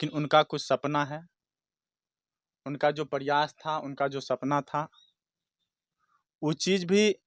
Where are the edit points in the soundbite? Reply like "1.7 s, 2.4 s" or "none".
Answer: none